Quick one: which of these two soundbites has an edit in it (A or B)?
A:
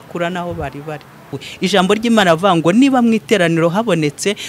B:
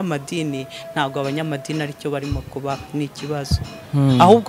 A